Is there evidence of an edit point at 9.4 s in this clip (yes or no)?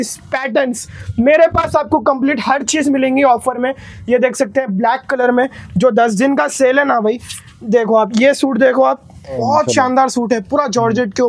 yes